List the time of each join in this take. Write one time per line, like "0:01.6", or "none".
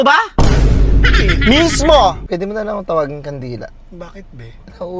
0:02.2

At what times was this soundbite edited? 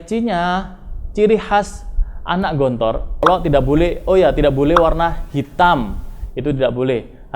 0:03.2

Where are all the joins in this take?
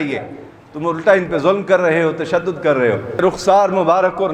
0:03.2

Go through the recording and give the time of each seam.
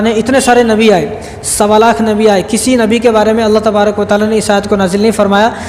none

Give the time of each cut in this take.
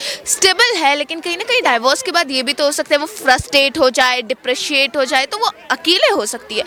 none

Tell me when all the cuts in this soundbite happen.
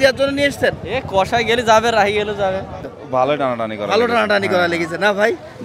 0:02.8

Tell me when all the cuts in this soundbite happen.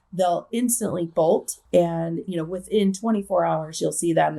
0:01.6

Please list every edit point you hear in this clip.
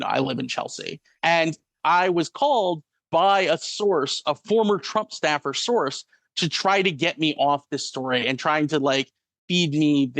0:01.8

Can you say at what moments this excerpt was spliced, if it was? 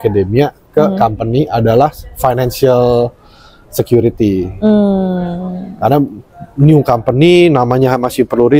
none

